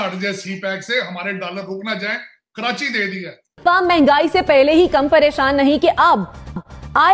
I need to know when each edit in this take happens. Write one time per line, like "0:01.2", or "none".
0:03.5